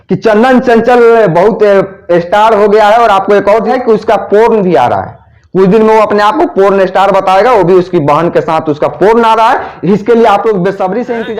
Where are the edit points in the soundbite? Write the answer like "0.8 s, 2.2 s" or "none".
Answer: 3.7 s